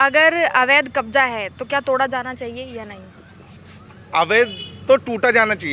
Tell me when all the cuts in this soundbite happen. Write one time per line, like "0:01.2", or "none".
none